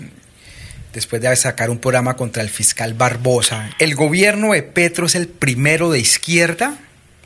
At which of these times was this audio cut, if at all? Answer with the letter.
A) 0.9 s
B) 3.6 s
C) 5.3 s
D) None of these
B